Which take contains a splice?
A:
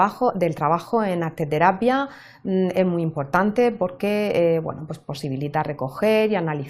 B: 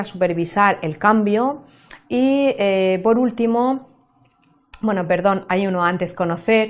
B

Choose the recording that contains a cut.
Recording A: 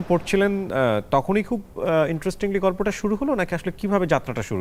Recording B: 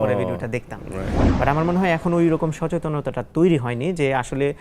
B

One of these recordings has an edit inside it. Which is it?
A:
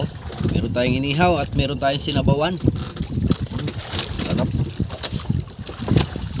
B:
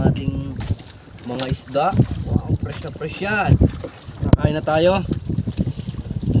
B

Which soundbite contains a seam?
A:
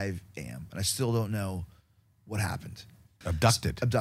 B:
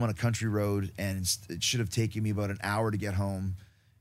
A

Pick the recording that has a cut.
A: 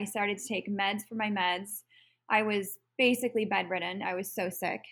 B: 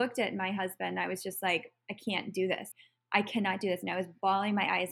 B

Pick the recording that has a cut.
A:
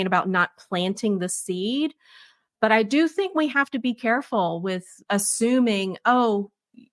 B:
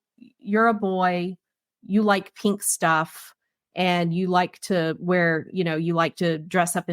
A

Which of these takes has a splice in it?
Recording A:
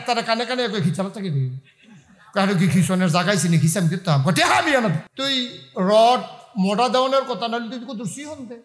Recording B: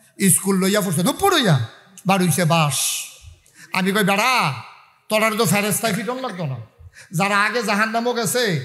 A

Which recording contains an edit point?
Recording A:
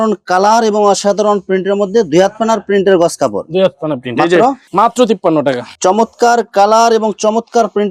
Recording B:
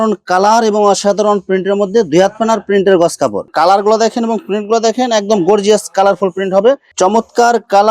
B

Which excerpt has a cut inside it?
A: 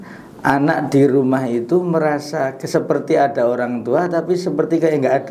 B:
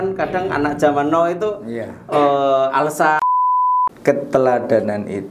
B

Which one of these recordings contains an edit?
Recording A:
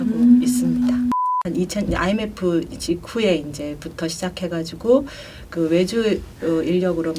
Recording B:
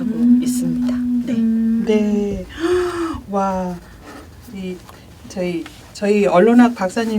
A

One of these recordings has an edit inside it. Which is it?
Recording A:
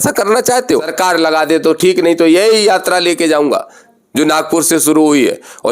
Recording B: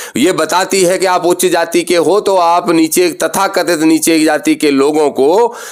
A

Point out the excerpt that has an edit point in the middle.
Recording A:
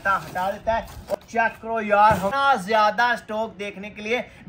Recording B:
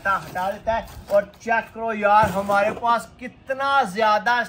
A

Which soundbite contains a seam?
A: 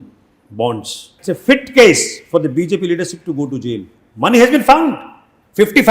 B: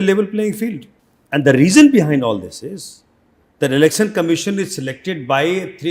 A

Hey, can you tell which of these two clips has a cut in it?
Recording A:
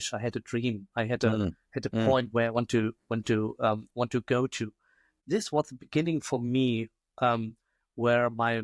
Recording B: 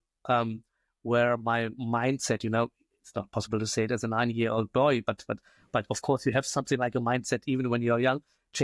A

